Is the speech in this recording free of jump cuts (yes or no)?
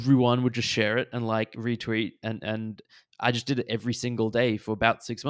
yes